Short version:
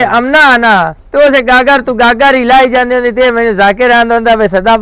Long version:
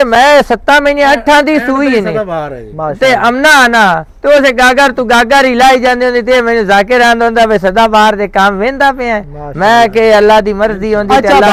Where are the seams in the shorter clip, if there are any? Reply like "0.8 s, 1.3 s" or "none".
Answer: none